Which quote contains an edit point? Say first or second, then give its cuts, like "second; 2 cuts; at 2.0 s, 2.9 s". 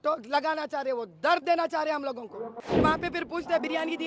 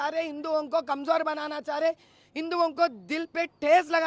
first; 1 cut; at 2.7 s